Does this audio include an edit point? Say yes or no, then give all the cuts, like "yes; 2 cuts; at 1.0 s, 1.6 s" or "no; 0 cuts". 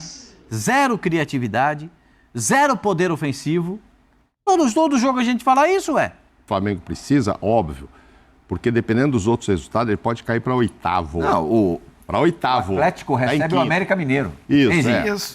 yes; 1 cut; at 6.5 s